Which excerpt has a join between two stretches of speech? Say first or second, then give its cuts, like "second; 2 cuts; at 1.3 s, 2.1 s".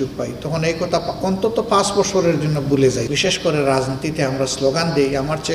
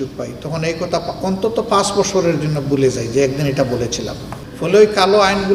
first; 1 cut; at 3.0 s